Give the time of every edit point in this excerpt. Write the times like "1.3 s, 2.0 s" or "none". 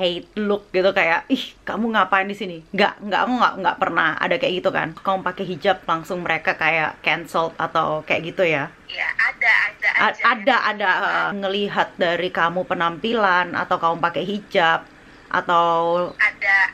5.0 s, 11.3 s